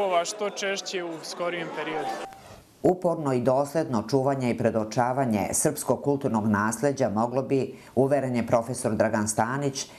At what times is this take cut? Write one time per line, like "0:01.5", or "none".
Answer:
0:02.4